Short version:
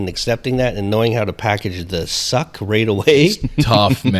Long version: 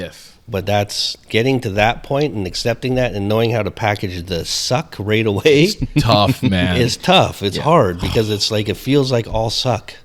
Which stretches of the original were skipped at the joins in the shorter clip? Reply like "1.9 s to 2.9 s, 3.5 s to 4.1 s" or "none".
none